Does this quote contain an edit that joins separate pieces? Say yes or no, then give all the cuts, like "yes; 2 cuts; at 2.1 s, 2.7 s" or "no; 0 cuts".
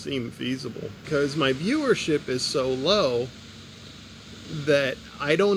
no; 0 cuts